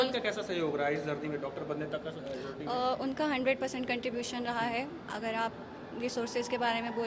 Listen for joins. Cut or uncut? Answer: uncut